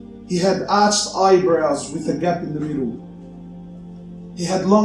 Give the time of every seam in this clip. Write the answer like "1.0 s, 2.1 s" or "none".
none